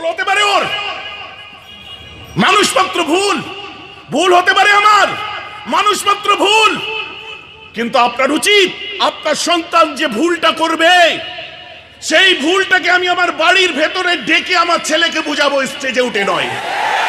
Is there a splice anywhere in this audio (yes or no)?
no